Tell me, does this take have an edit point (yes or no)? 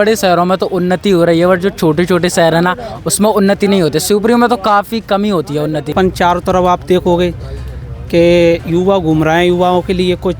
yes